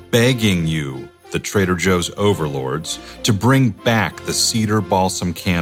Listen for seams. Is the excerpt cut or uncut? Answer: uncut